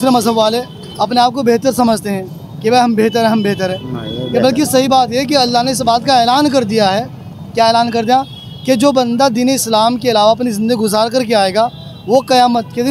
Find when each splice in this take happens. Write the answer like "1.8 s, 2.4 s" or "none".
none